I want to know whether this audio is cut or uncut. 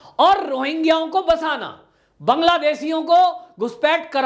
uncut